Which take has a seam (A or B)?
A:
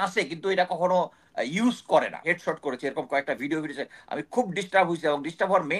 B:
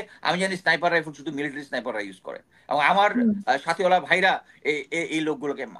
A